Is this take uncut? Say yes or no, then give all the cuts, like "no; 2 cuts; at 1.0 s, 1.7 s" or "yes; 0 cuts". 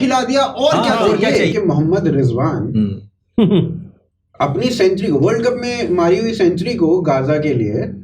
no; 1 cut; at 1.5 s